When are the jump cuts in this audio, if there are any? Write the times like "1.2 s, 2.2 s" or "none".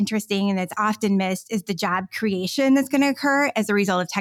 none